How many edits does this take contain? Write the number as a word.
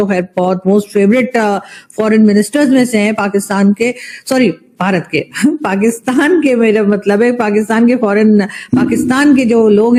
zero